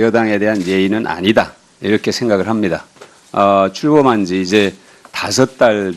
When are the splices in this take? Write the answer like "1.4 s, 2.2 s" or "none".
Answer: 1.2 s